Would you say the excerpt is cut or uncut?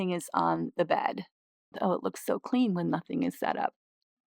cut